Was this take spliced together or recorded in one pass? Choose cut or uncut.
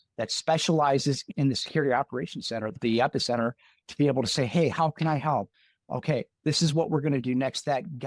cut